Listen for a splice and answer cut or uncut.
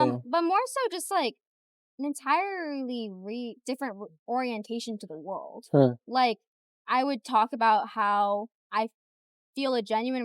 uncut